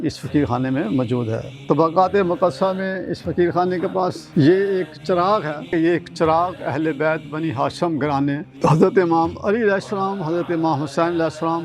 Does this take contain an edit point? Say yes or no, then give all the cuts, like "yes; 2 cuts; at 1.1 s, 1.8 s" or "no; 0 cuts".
yes; 4 cuts; at 1.5 s, 4.2 s, 5.7 s, 8.5 s